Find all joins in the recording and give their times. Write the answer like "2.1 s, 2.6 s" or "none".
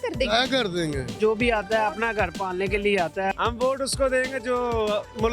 1.1 s, 3.3 s